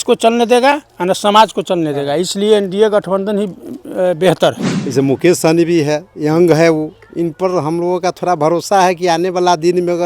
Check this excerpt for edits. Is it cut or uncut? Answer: cut